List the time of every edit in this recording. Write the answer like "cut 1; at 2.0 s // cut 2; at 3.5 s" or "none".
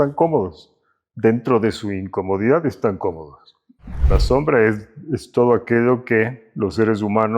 cut 1; at 4.0 s // cut 2; at 6.4 s